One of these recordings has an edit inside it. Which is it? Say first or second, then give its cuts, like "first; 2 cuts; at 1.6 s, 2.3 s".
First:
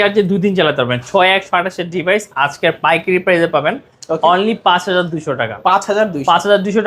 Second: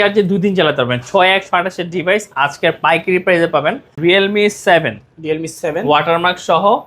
second; 1 cut; at 3.9 s